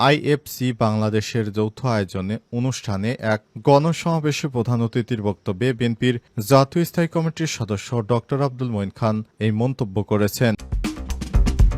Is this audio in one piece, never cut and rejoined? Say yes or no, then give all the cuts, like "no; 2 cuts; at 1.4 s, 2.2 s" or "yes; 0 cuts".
no; 1 cut; at 10.7 s